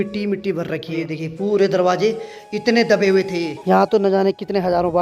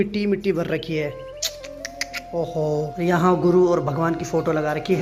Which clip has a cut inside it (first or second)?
first